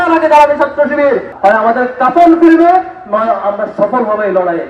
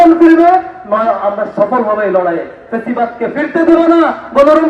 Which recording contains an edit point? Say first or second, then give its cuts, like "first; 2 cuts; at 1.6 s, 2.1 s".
first; 1 cut; at 1.3 s